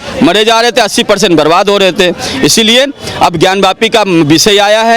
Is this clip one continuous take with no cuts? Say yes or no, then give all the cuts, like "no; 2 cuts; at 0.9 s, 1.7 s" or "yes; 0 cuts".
yes; 0 cuts